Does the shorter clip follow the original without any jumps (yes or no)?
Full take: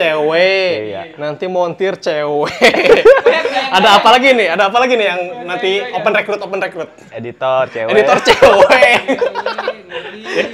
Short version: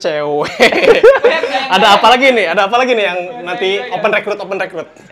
yes